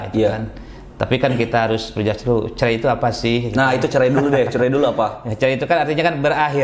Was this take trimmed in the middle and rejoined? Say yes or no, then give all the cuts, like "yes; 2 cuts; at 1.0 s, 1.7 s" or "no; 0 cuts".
no; 0 cuts